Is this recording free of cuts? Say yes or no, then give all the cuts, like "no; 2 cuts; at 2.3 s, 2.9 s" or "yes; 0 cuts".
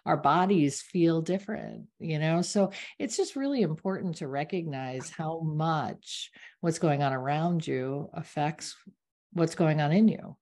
yes; 0 cuts